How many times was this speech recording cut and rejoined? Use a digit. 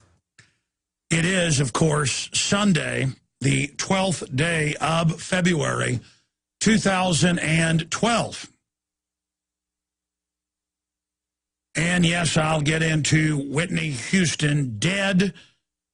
1